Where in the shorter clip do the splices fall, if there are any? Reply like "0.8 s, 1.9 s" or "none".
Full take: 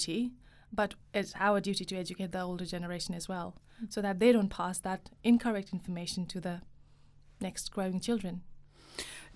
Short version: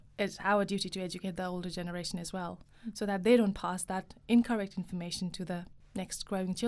5.8 s